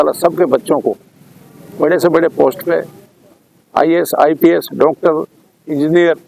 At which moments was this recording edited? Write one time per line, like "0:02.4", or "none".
none